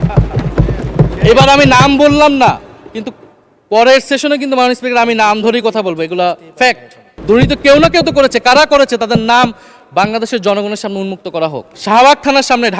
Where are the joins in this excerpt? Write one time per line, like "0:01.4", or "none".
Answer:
0:07.2
0:11.7

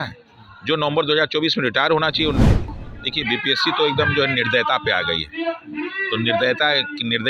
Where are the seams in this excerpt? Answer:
0:02.7

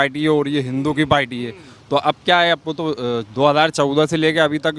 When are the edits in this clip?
none

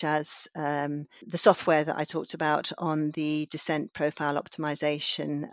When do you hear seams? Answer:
0:01.2

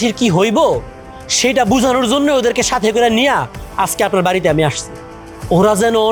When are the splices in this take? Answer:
none

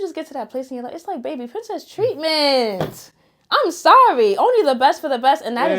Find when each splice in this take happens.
none

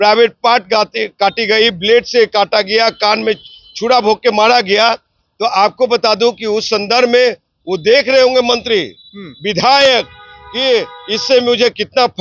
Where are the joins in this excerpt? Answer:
none

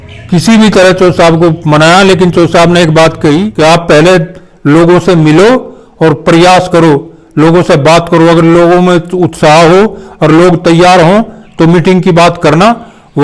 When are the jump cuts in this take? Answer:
0:03.5

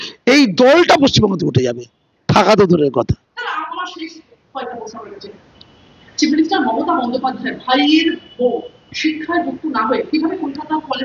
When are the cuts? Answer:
none

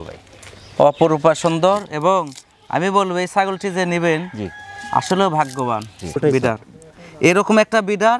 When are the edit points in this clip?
0:06.1

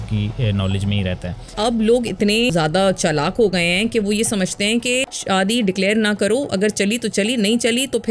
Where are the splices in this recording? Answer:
0:01.5
0:02.5
0:05.1

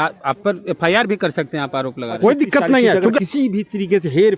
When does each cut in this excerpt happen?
0:03.2

